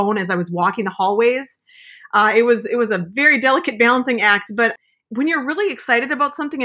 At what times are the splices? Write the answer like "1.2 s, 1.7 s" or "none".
4.7 s

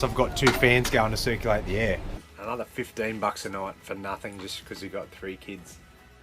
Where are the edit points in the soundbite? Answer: 2.1 s

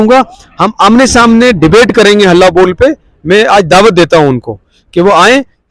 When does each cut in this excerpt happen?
none

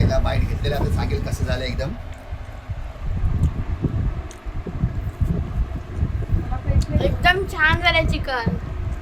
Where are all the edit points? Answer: none

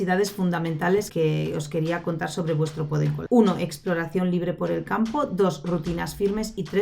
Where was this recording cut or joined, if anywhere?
1.1 s, 3.2 s

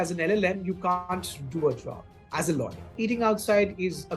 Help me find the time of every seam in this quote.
2.8 s

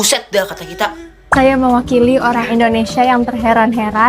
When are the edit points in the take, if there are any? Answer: 1.3 s

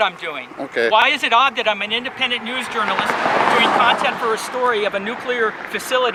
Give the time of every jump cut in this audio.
none

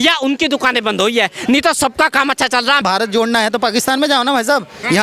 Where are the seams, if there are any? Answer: 2.8 s

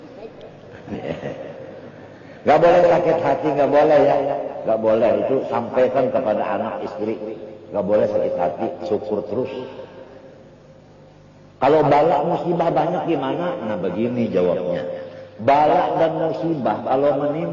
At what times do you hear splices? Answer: 0.9 s

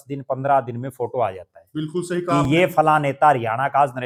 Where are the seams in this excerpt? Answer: none

